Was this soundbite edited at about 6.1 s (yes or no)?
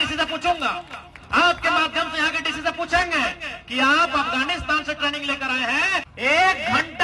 yes